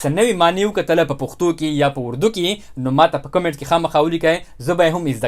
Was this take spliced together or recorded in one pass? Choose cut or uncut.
uncut